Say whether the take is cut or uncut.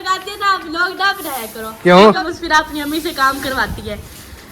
cut